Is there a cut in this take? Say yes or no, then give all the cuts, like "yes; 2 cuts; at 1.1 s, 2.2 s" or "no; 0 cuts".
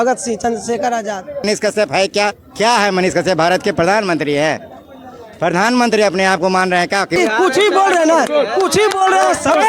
yes; 2 cuts; at 1.4 s, 7.2 s